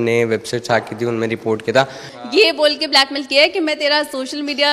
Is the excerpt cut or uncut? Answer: cut